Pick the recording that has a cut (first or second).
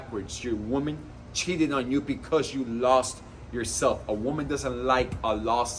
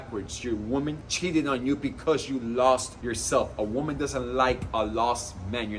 second